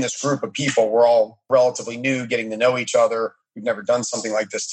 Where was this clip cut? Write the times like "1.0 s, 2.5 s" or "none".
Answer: 1.4 s

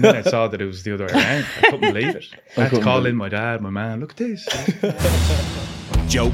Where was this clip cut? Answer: 5.1 s

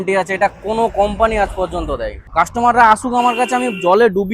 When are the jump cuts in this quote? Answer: 2.2 s

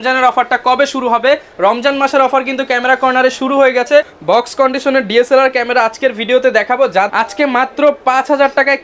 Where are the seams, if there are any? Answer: 4.2 s, 7.1 s

